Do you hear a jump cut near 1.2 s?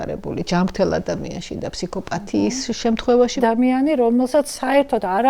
no; 1 cut; at 3.4 s

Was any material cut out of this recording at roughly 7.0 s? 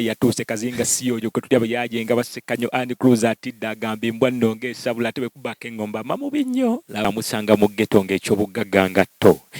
yes; 1 cut; at 7.0 s

